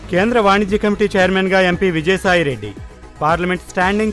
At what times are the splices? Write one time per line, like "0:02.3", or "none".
none